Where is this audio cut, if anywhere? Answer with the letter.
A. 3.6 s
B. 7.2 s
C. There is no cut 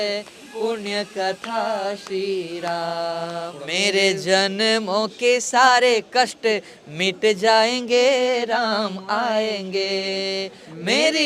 A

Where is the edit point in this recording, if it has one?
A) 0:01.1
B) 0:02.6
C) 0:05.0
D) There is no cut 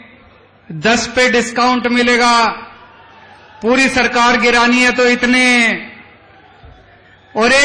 D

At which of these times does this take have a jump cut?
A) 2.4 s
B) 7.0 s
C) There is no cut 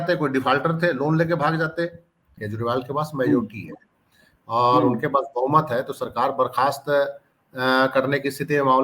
A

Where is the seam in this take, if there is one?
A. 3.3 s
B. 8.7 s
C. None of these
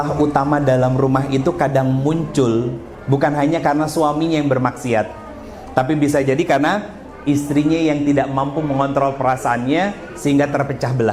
C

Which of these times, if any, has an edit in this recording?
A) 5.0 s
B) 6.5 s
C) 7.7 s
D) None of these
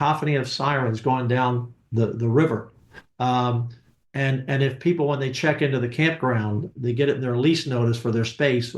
D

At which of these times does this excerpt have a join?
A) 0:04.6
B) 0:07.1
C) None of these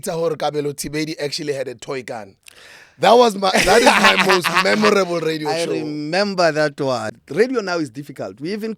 B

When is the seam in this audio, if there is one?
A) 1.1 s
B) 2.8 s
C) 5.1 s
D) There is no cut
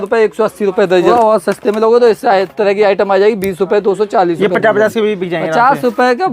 A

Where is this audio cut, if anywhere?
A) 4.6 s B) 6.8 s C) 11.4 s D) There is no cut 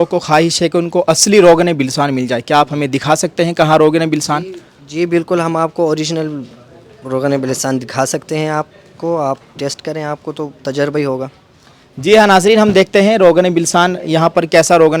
D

